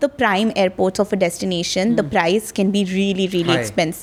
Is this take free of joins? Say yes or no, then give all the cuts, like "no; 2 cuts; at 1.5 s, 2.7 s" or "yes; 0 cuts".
yes; 0 cuts